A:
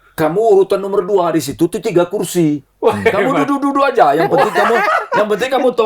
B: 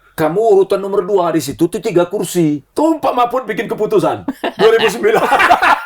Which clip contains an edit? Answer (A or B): B